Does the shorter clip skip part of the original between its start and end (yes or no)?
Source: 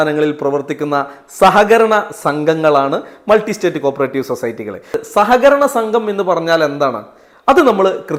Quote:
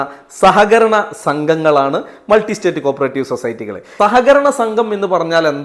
yes